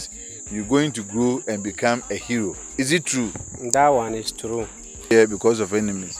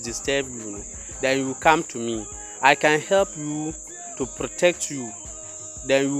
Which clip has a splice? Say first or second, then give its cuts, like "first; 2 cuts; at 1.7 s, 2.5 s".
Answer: first; 1 cut; at 5.1 s